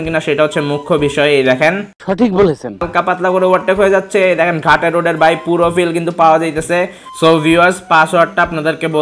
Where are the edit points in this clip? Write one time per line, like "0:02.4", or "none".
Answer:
0:02.9
0:07.0